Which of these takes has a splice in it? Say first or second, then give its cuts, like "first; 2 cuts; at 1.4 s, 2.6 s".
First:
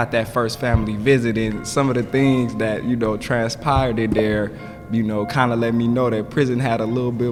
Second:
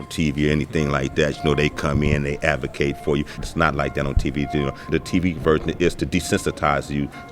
second; 2 cuts; at 3.4 s, 4.9 s